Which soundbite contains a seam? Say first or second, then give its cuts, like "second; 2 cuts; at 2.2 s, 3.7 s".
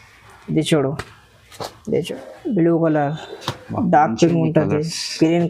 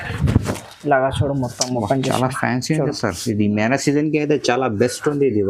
first; 1 cut; at 2.1 s